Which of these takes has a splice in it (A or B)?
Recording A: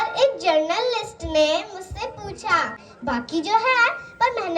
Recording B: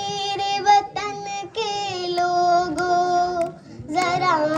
A